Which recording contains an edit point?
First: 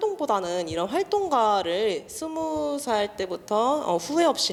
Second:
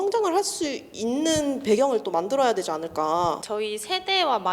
second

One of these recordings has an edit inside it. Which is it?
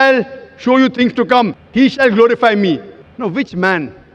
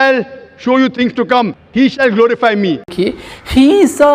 first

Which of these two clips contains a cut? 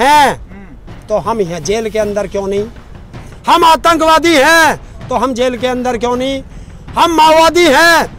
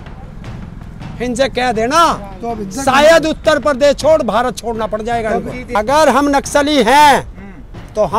second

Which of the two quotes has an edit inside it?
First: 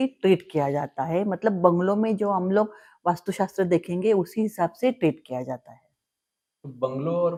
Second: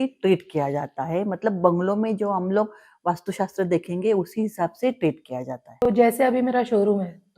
second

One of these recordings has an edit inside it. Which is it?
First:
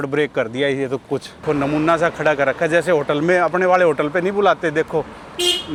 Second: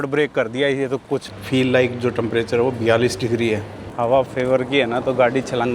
second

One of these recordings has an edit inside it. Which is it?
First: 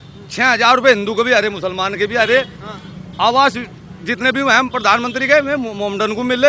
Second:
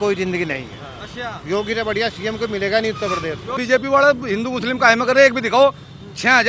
second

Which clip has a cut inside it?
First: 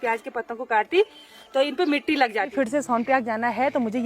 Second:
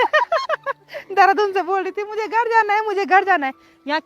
first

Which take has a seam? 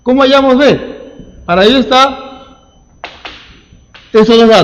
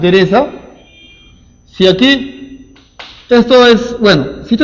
first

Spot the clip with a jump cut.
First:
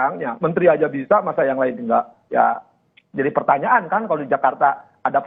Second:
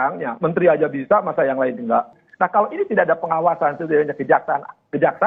first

